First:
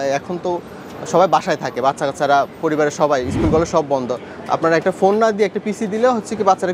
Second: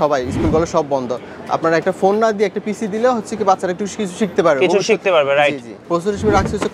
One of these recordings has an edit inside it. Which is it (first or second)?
second